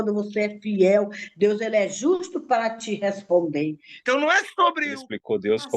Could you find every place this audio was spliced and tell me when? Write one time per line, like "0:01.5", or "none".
0:03.9